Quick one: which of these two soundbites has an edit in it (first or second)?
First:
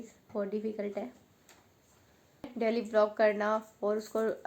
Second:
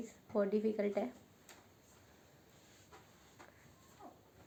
first